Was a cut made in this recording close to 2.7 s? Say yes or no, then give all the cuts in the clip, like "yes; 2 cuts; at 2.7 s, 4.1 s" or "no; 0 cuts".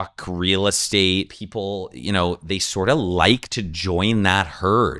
no; 1 cut; at 1.4 s